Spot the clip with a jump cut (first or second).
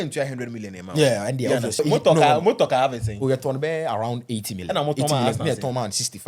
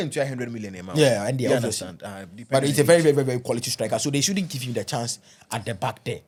first